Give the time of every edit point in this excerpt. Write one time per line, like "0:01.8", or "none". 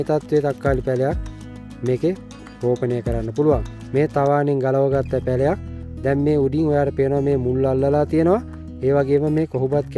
none